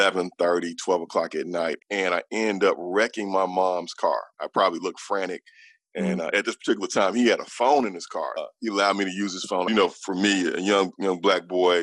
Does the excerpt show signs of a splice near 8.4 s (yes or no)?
yes